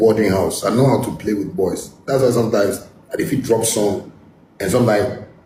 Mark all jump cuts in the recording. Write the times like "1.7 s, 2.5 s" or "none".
none